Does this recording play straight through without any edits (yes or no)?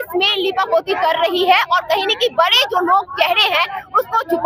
yes